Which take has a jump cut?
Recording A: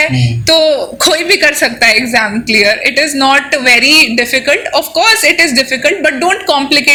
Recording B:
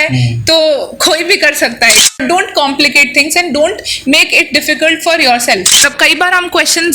B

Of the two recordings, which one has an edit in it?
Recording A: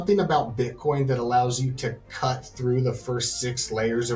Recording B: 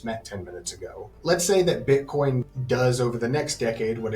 B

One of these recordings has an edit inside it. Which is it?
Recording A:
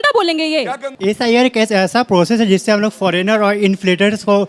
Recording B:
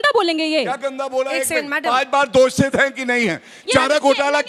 A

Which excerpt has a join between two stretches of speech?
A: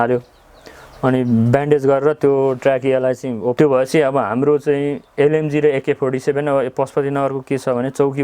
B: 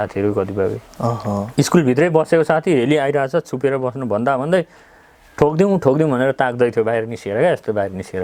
A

